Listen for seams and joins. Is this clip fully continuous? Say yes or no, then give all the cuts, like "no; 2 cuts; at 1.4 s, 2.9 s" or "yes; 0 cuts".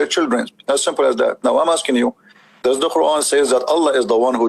yes; 0 cuts